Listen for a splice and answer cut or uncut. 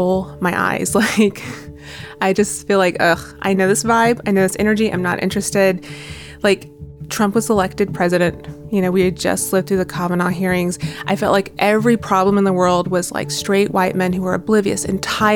uncut